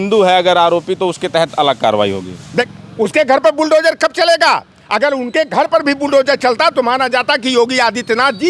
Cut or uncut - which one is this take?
cut